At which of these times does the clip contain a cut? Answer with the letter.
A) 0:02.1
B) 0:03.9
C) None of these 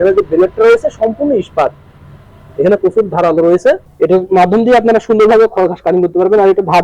B